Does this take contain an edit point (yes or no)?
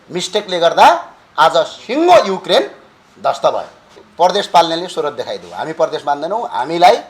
yes